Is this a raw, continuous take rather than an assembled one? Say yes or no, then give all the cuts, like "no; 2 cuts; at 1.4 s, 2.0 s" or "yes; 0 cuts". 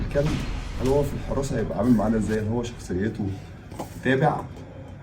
yes; 0 cuts